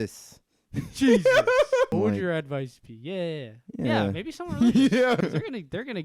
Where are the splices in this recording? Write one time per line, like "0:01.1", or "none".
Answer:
0:01.9
0:05.2

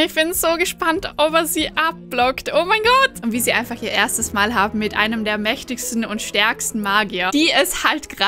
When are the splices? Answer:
0:03.2
0:07.3

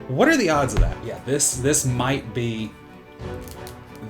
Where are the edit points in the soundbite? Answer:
0:00.9

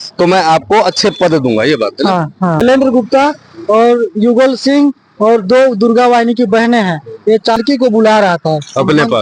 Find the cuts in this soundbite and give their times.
0:02.6
0:07.6

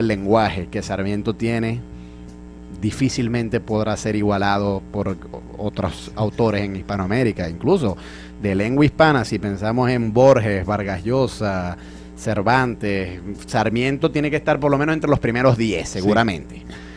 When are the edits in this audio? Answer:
0:10.7

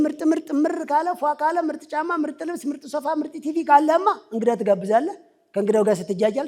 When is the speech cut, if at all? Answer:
none

